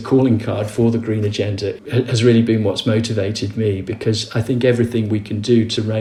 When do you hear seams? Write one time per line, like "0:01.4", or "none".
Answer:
none